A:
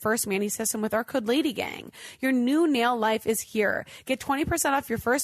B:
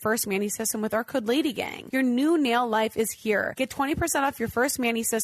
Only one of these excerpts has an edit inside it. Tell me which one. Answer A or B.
B